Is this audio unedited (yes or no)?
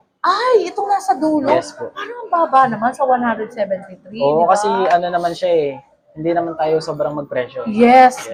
yes